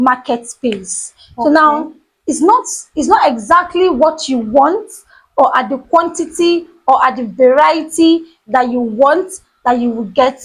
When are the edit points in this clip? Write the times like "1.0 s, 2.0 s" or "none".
none